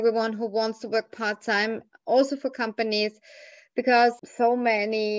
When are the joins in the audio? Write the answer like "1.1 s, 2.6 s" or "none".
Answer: 4.3 s